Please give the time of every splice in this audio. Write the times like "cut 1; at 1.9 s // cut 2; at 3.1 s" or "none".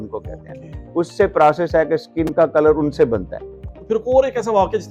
cut 1; at 3.6 s